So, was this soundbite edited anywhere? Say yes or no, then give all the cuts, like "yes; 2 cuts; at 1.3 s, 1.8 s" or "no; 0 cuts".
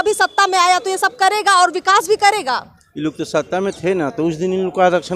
no; 0 cuts